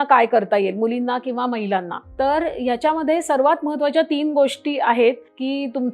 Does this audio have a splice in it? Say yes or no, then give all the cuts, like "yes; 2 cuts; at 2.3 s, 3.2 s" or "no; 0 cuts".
no; 0 cuts